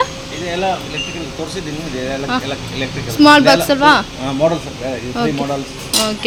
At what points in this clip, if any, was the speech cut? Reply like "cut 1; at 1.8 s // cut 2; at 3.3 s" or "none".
none